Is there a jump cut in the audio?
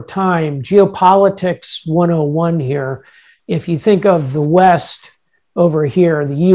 no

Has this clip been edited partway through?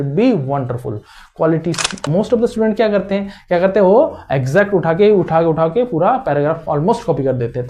yes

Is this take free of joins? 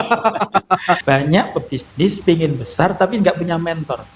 no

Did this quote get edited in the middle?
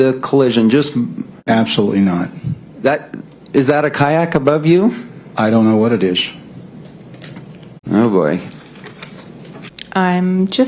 yes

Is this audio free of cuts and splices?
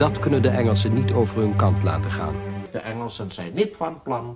no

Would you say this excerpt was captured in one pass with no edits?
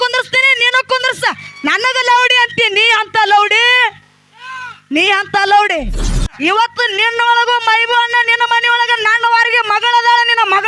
no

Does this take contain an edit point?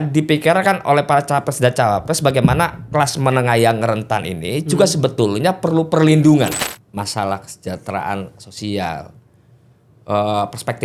yes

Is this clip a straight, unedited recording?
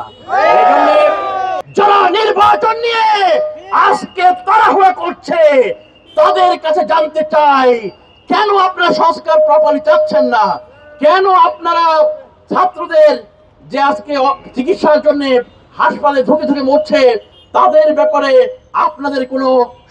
no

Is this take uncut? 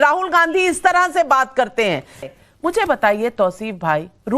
no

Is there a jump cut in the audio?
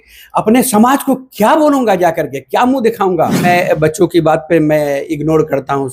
yes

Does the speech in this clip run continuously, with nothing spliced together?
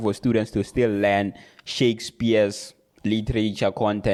yes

